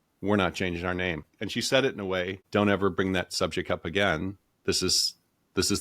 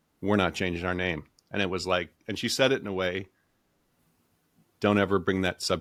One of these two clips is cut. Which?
first; 2 cuts; at 1.3 s, 2.4 s

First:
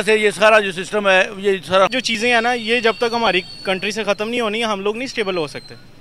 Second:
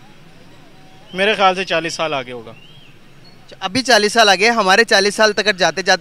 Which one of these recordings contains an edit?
first; 1 cut; at 1.9 s

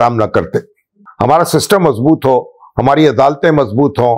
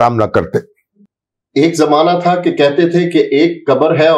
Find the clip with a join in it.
first; 1 cut; at 1.0 s

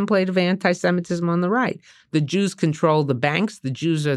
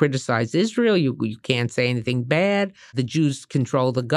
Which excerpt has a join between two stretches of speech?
second; 1 cut; at 2.9 s

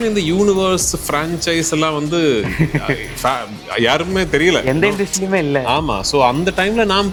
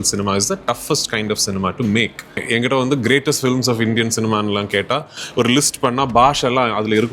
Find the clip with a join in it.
second; 1 cut; at 2.4 s

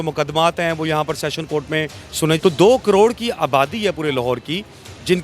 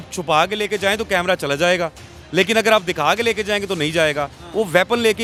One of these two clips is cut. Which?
first; 1 cut; at 2.4 s

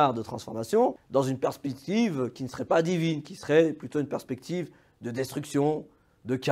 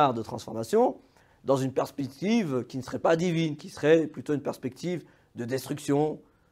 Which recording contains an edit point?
first; 1 cut; at 1.0 s

